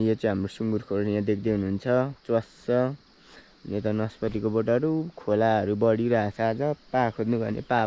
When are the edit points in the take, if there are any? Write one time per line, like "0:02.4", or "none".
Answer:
none